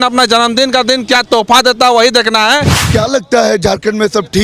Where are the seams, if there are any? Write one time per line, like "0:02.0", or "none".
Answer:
0:02.8